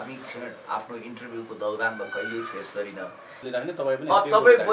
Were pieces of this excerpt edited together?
yes; 1 cut; at 3.3 s

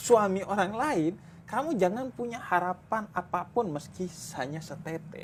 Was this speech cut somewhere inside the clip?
no; 0 cuts

